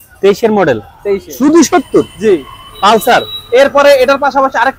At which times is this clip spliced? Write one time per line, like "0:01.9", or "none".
0:01.3